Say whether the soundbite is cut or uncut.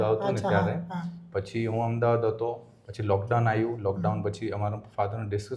uncut